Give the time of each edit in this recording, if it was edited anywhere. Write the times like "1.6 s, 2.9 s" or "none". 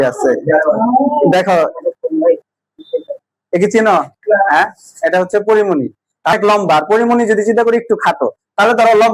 6.3 s